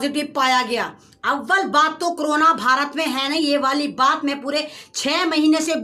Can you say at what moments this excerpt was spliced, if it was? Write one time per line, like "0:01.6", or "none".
none

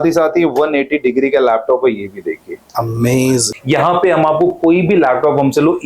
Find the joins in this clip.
0:03.5

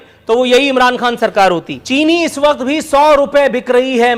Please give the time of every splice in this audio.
0:01.7

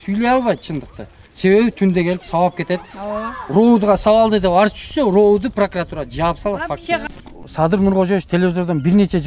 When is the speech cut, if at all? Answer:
0:07.1

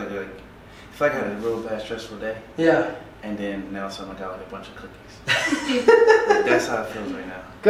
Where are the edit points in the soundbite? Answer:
none

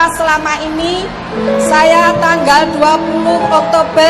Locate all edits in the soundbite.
none

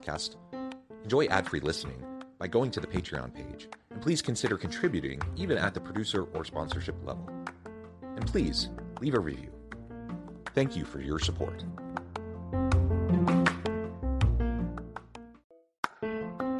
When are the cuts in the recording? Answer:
0:15.3

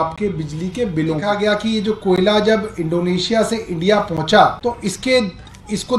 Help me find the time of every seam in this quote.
0:01.4
0:04.6

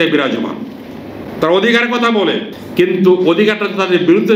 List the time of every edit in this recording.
0:02.5

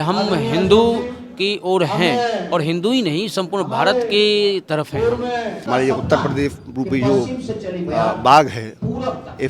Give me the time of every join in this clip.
0:05.7

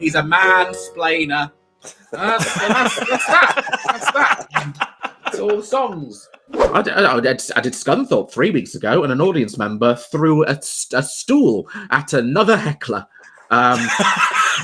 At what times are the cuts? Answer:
0:06.7

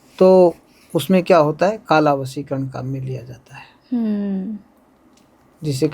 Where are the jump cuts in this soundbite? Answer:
none

